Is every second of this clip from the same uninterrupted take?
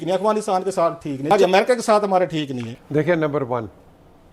no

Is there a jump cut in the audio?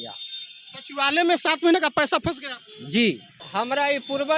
yes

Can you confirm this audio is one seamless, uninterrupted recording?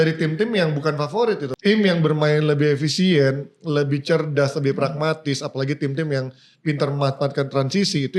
no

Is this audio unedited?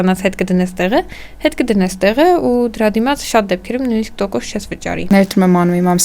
no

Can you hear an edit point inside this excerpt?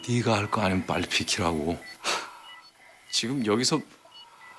no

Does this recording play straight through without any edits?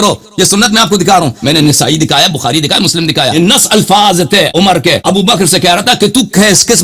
no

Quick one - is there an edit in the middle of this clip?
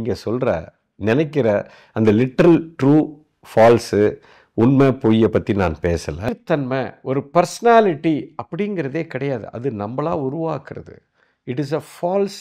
yes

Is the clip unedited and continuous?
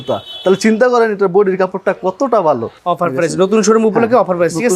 no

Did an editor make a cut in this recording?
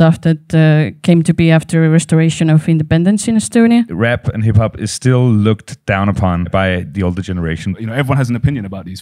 yes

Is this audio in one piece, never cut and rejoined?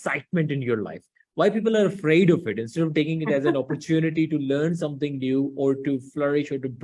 yes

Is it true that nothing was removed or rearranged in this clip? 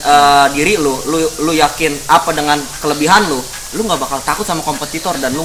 yes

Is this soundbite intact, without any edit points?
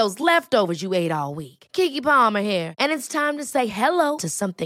yes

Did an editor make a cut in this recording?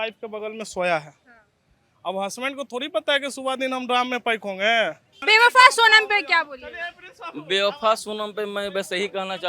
no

